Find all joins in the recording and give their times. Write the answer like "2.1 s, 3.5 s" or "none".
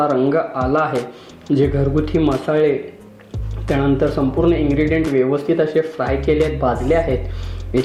none